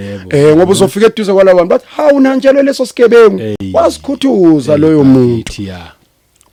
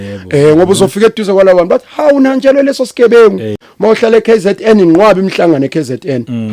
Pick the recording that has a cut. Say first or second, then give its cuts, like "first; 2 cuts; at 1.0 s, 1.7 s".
second; 1 cut; at 3.6 s